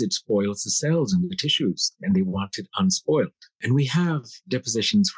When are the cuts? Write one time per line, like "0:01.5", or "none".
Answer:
0:03.6